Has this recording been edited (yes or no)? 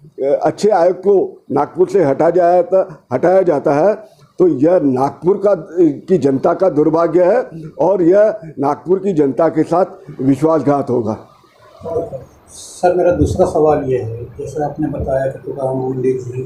no